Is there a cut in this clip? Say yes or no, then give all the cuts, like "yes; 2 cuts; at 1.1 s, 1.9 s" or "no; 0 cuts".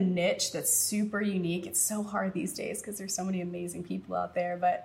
no; 0 cuts